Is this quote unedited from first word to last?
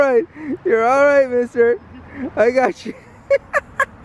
yes; 0 cuts

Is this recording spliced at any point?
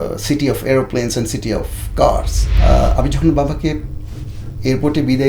yes; 1 cut; at 2.4 s

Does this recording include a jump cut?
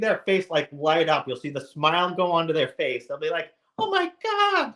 no; 0 cuts

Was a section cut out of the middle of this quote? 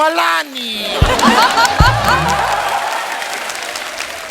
no; 0 cuts

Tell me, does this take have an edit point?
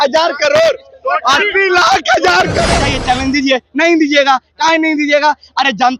yes; 1 cut; at 2.7 s

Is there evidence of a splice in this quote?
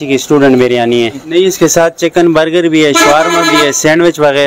yes; 1 cut; at 1.2 s

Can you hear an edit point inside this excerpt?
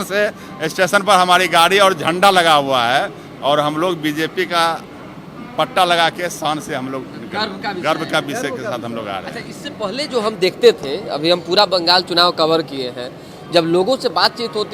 no; 0 cuts

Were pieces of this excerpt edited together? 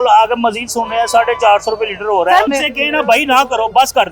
yes; 1 cut; at 2.5 s

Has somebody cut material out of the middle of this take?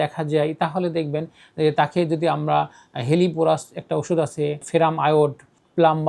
yes; 1 cut; at 4.6 s

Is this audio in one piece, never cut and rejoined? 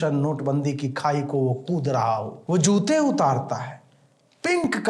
no; 1 cut; at 2.3 s

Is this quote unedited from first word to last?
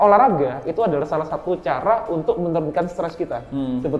yes; 0 cuts

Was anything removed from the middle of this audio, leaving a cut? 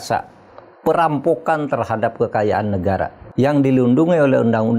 yes; 1 cut; at 3.2 s

